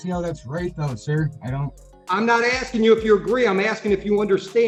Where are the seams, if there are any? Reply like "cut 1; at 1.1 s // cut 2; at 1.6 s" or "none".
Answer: none